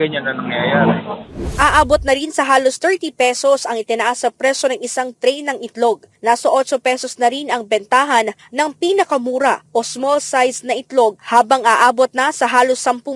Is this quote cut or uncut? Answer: cut